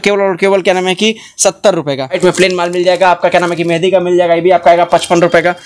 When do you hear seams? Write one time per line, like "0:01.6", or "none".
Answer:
0:02.2